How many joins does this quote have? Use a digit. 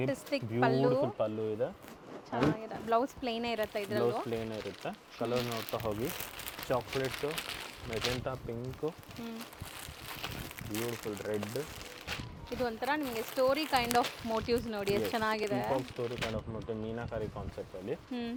0